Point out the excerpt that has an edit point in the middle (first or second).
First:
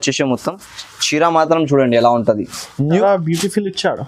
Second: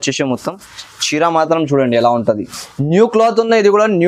first